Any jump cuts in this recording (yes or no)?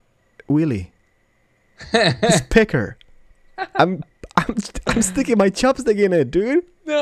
no